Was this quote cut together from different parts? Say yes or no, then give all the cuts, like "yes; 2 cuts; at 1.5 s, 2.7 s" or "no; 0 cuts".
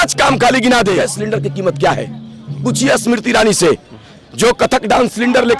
yes; 1 cut; at 1.0 s